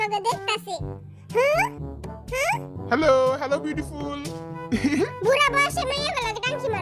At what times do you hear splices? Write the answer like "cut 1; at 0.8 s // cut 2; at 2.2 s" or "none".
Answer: none

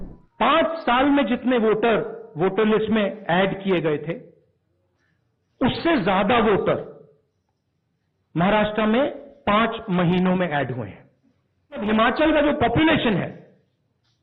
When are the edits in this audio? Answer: cut 1; at 11.8 s

